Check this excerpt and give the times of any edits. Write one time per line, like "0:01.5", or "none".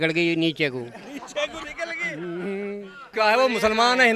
0:03.1